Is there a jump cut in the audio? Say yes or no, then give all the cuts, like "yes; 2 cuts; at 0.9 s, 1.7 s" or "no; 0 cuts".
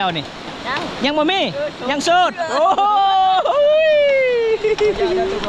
no; 0 cuts